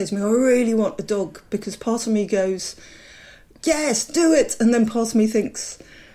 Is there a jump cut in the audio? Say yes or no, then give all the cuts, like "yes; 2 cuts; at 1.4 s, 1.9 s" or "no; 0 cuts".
no; 0 cuts